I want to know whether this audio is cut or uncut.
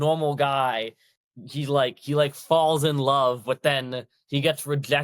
uncut